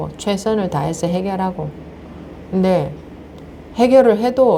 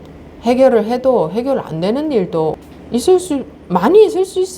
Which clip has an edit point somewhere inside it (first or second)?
second